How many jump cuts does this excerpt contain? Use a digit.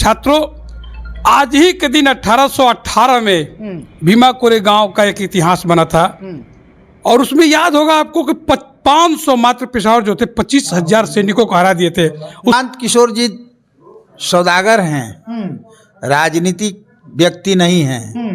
1